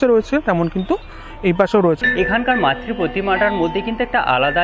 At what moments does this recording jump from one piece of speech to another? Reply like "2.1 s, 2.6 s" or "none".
2.0 s